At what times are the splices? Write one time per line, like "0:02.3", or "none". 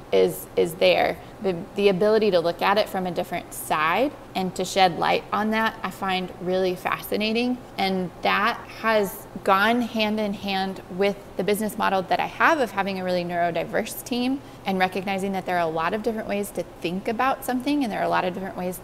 none